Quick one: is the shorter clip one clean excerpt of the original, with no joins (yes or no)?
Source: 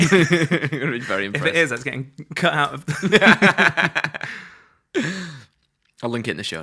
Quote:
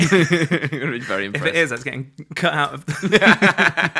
yes